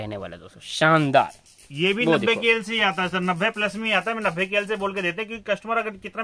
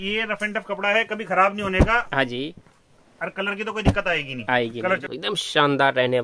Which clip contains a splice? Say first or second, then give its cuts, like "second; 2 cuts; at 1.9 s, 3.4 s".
second; 1 cut; at 5.0 s